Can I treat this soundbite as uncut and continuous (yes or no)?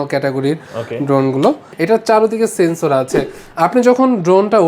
no